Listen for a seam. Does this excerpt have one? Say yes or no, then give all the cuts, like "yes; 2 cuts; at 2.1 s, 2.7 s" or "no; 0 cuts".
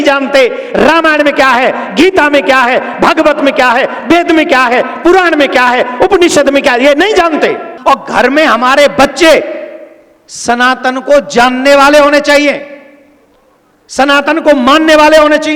yes; 1 cut; at 7.7 s